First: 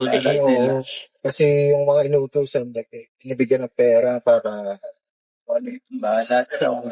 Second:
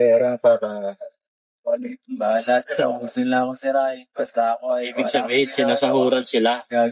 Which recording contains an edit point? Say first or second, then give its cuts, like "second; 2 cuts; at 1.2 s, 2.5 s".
first; 1 cut; at 1.8 s